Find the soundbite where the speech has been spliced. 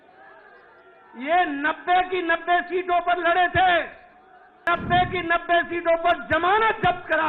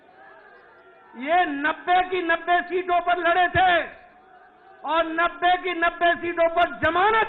first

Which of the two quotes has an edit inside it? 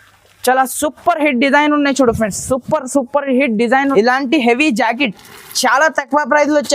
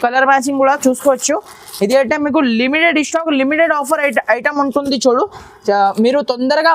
first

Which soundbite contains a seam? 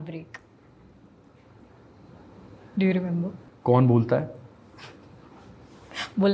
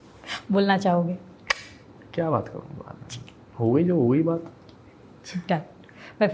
first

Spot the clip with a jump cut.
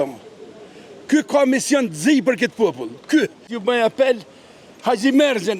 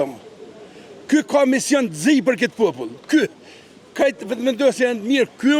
first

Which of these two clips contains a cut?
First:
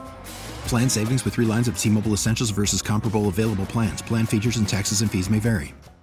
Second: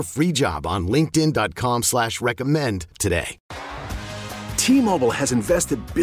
second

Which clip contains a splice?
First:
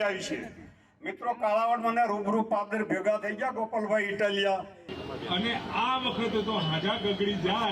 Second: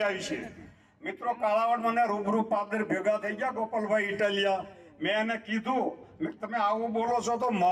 first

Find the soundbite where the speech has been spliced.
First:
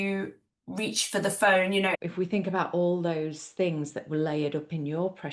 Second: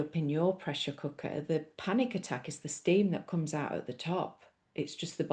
first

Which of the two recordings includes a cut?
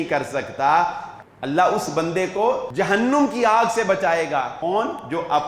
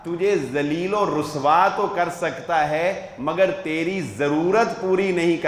first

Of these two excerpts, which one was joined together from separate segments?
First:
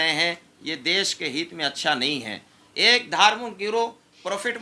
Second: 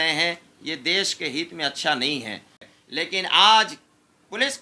second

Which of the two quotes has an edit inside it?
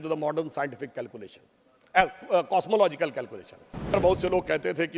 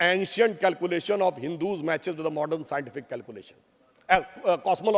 first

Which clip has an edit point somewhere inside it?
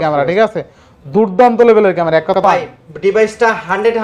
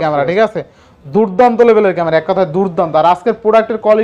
first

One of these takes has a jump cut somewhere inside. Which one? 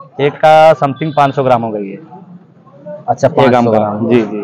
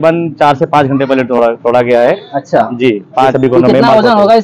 second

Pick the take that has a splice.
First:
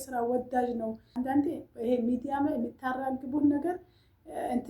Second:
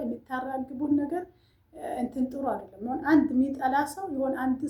first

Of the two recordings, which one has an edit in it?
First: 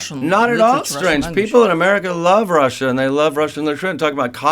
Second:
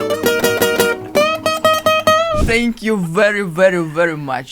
second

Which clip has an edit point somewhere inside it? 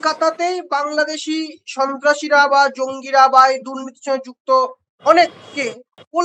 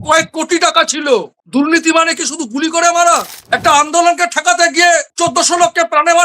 second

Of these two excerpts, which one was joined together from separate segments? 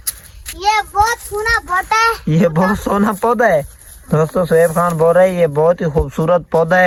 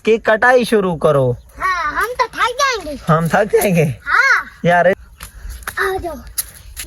second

